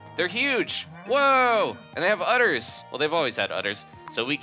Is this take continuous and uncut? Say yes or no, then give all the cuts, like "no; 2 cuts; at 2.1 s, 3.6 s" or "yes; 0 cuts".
yes; 0 cuts